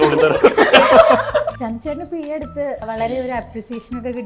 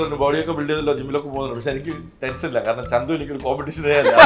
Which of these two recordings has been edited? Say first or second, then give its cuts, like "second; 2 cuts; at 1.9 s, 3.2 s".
first; 2 cuts; at 1.6 s, 2.8 s